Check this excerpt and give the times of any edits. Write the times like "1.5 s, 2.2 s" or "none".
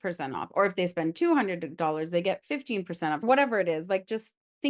3.2 s